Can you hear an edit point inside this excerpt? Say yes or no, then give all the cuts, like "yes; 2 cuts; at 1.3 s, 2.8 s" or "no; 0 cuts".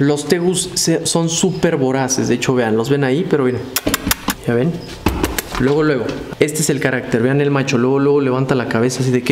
yes; 2 cuts; at 4.4 s, 6.2 s